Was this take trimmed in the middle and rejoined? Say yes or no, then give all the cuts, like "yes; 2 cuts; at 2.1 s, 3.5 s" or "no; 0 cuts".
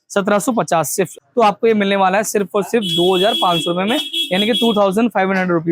yes; 1 cut; at 1.1 s